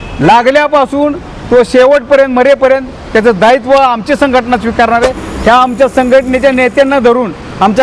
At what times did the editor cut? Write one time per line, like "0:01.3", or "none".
0:05.0